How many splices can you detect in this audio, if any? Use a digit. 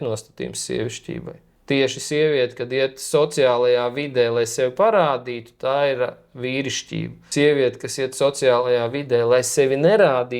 0